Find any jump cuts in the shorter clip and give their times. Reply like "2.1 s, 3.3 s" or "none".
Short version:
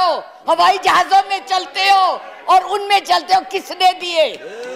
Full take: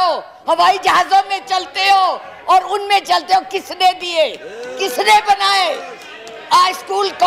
none